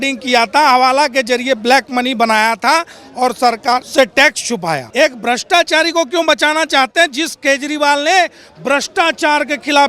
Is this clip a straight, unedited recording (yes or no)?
no